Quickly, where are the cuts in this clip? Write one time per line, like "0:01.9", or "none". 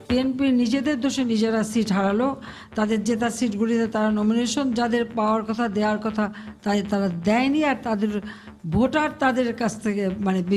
none